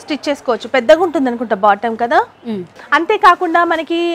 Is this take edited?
yes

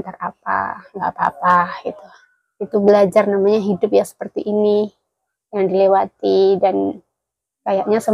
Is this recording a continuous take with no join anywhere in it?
yes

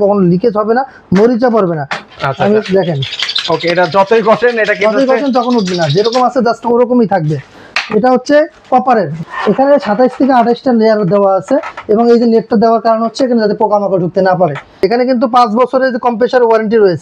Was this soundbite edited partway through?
yes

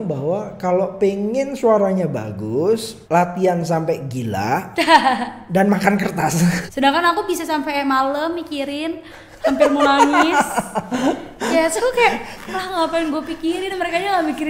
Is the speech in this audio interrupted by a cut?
yes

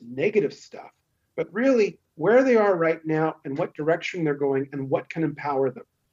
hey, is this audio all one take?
yes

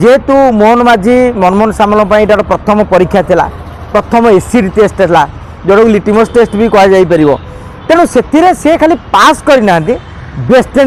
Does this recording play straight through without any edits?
yes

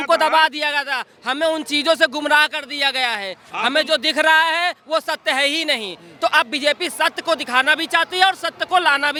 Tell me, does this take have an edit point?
no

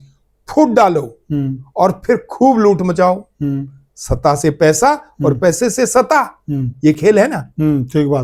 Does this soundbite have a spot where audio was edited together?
no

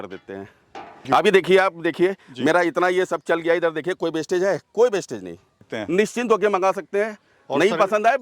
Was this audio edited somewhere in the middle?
yes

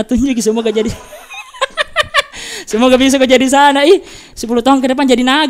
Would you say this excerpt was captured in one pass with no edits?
yes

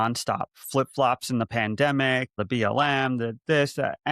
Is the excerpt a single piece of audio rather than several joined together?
no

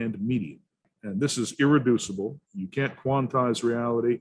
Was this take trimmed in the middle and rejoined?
yes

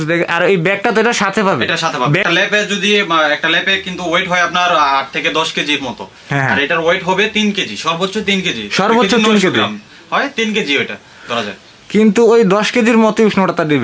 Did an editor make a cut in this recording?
yes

